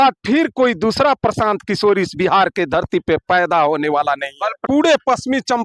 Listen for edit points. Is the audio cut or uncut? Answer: cut